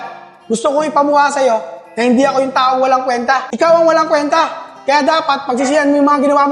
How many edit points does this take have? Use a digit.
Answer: 1